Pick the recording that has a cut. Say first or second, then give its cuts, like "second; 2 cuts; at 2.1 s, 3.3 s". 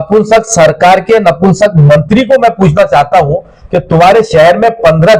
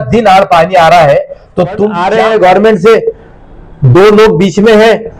second; 1 cut; at 2.0 s